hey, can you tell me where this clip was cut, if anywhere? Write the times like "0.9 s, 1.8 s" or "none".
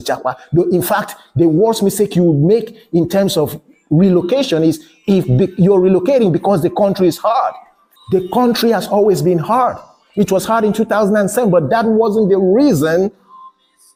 none